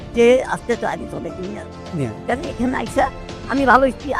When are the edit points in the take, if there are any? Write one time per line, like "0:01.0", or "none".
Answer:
none